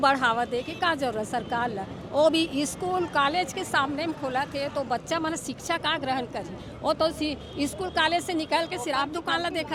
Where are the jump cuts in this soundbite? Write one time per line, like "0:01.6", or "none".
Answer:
none